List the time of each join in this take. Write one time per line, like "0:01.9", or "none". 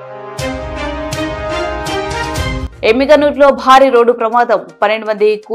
0:02.6